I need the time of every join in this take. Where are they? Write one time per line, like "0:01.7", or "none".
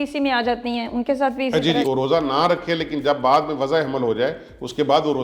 0:01.8